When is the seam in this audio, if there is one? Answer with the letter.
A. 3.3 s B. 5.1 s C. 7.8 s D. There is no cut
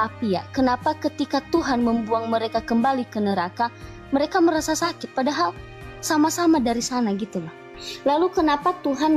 C